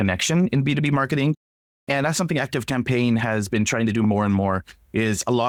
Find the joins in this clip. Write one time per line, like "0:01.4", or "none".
none